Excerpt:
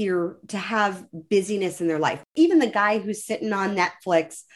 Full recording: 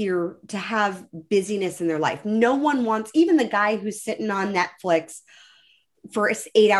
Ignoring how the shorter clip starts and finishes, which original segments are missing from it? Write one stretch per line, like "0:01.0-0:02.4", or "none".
0:02.2-0:03.0